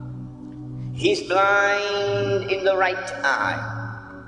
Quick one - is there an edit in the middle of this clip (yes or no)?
yes